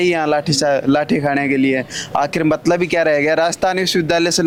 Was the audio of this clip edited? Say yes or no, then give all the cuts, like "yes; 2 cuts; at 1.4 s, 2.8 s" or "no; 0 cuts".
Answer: no; 0 cuts